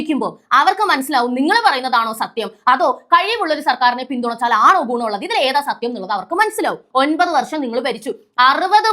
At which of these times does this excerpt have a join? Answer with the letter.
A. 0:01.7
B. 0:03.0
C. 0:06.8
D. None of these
C